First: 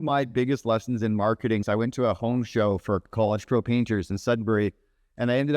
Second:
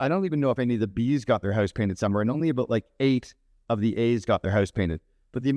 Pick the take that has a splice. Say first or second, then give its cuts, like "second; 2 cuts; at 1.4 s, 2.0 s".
first; 2 cuts; at 1.6 s, 3.1 s